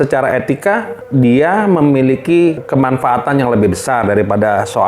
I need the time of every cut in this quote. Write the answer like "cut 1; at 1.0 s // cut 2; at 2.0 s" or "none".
cut 1; at 1.0 s // cut 2; at 2.6 s